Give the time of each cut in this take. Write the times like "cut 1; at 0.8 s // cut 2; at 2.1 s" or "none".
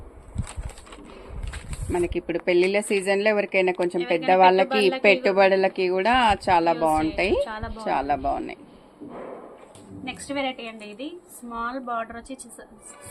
none